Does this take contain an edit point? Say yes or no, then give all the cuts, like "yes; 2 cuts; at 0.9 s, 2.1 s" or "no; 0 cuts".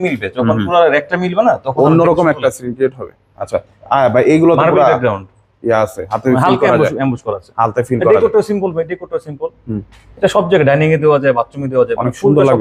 no; 0 cuts